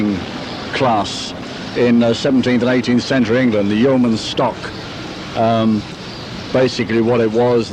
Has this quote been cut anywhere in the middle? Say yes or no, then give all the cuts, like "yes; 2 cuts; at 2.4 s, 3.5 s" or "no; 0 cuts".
no; 0 cuts